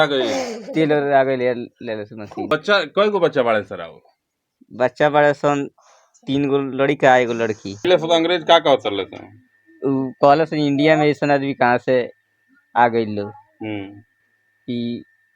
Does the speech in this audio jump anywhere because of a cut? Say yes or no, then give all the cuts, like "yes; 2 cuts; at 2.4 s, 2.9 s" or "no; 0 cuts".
yes; 2 cuts; at 2.5 s, 7.9 s